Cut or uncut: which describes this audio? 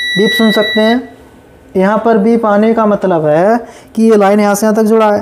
uncut